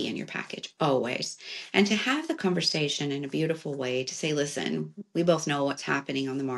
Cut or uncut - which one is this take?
uncut